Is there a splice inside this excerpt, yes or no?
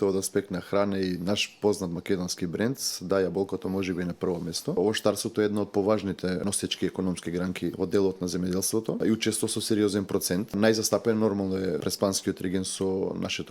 yes